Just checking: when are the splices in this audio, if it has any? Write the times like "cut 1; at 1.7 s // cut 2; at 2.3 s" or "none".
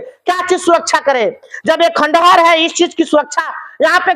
none